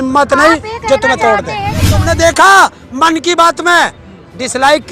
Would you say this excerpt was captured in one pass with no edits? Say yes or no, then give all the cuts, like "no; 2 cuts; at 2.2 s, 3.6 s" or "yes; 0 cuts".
no; 1 cut; at 1.9 s